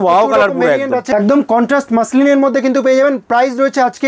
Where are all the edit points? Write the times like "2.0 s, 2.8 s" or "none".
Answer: 1.1 s